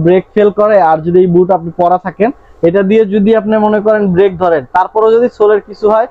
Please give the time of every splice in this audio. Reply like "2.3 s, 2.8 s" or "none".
none